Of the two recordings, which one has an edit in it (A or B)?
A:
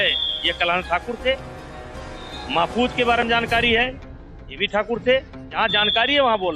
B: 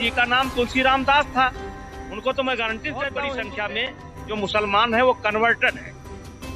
B